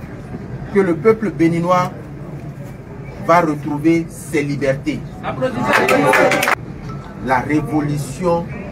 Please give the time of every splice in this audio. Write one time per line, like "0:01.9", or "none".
0:06.6